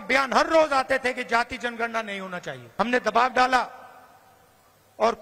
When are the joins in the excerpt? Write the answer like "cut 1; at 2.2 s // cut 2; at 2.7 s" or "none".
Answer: cut 1; at 2.6 s